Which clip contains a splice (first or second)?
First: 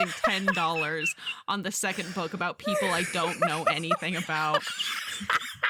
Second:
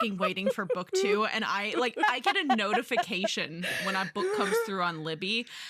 second